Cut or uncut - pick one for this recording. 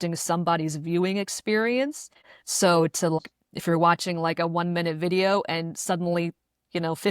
cut